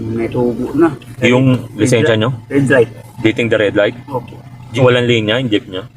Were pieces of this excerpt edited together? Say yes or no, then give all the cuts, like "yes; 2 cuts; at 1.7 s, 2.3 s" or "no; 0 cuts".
yes; 1 cut; at 4.6 s